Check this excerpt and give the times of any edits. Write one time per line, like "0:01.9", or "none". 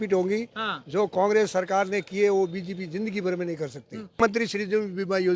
0:04.2